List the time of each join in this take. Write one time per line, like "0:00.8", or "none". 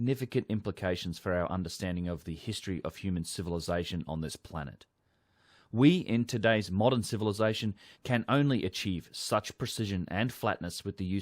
0:05.6